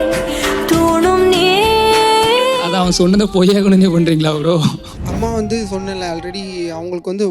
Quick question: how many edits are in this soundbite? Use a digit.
2